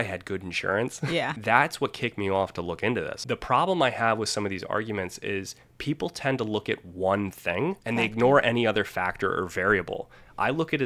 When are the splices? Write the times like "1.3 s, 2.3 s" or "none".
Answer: 1.3 s, 3.1 s, 7.8 s